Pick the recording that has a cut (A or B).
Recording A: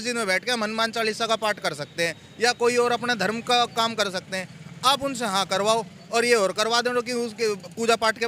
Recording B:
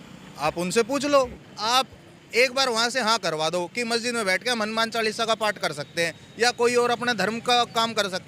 B